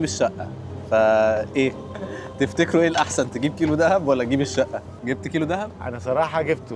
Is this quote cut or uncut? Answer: cut